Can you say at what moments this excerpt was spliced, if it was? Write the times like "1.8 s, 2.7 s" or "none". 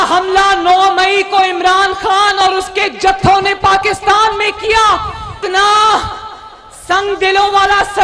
5.3 s